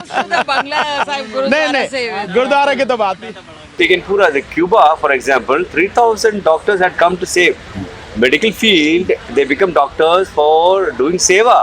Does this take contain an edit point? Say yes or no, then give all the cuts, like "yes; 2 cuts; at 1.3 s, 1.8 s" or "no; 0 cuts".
yes; 1 cut; at 3.7 s